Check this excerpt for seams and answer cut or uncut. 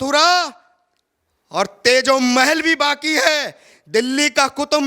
uncut